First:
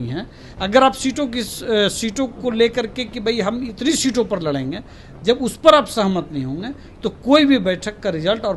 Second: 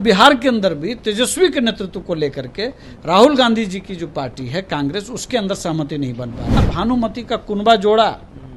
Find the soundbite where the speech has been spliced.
second; 1 cut; at 6.6 s

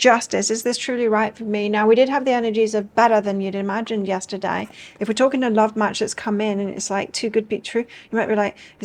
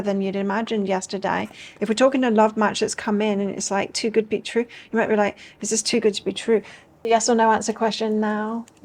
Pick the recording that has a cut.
second; 1 cut; at 7.1 s

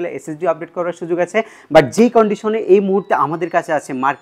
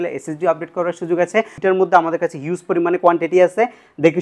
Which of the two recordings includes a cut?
second; 1 cut; at 1.5 s

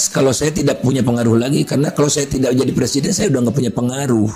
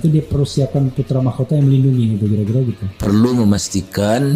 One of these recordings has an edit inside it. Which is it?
second; 1 cut; at 2.9 s

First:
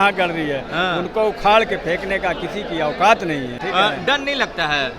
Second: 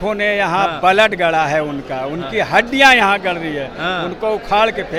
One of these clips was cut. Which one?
first; 1 cut; at 3.6 s

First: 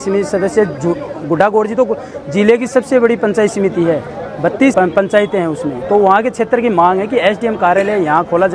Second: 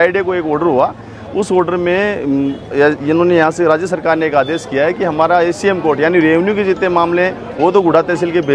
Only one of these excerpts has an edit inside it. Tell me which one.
first; 1 cut; at 4.7 s

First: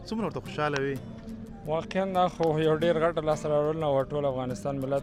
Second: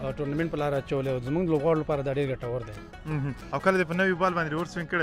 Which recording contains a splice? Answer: second; 1 cut; at 3.5 s

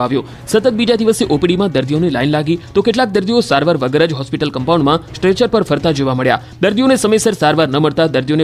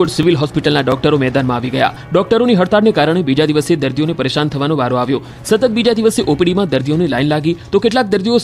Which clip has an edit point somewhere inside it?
second; 1 cut; at 3.9 s

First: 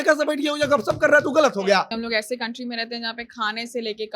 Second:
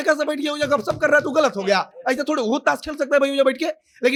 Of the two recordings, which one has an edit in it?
first; 1 cut; at 1.9 s

